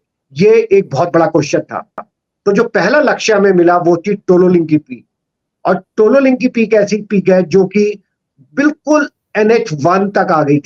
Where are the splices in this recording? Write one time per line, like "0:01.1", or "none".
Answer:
none

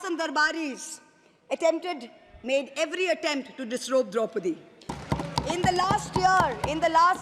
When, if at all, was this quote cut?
0:05.0

